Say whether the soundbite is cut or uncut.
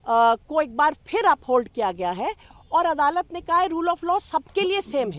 uncut